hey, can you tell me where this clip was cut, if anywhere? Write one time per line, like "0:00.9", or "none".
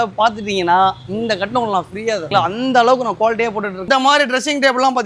0:03.9